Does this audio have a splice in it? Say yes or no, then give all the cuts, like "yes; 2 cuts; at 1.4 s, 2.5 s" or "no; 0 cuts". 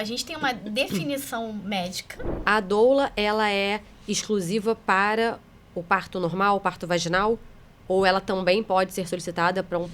yes; 1 cut; at 2.4 s